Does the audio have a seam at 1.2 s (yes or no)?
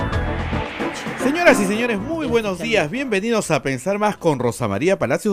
yes